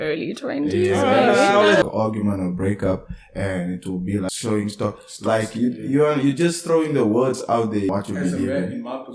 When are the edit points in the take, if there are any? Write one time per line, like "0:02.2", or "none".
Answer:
0:01.8
0:04.3
0:07.9